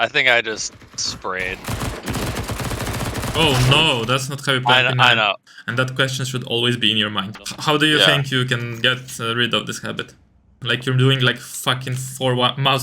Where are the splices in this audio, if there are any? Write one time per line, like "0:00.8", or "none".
0:05.4
0:07.3
0:10.6